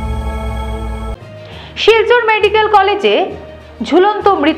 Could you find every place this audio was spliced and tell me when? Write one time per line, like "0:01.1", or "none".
0:01.1